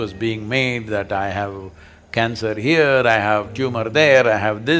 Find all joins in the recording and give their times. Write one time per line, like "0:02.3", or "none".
none